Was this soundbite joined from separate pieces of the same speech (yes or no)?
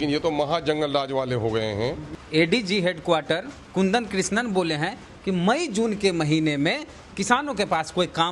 yes